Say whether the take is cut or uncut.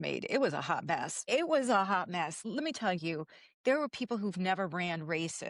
cut